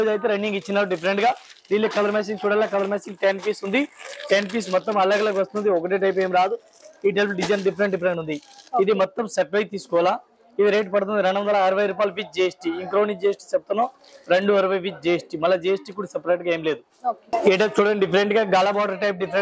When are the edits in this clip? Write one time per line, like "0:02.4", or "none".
none